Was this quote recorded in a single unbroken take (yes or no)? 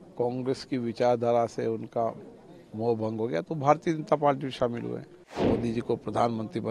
no